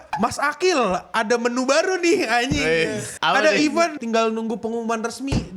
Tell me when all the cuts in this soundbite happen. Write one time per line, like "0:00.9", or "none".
0:03.1
0:04.0